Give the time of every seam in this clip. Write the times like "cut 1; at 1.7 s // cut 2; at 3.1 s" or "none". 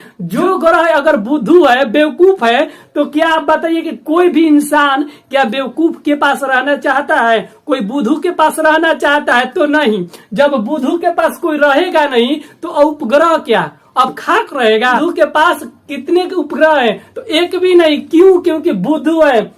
cut 1; at 15.0 s